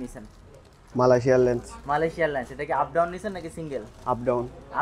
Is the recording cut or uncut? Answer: uncut